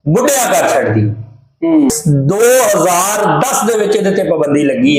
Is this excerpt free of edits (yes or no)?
no